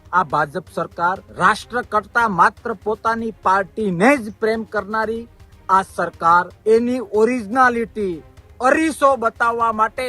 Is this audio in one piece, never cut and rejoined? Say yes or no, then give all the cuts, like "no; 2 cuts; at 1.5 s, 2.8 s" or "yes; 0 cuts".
no; 2 cuts; at 1.3 s, 6.5 s